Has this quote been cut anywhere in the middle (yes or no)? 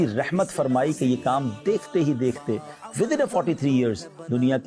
no